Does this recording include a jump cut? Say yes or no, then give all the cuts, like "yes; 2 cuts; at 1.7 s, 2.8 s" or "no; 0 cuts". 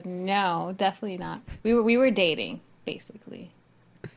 no; 0 cuts